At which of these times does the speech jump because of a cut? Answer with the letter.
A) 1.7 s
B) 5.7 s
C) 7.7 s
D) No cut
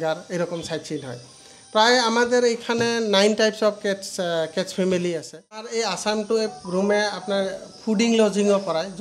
B